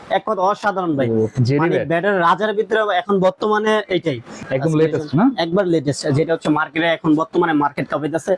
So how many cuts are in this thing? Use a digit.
1